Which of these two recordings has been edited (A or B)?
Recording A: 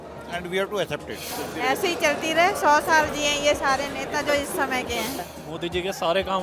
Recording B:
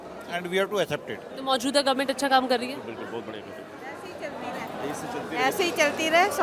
A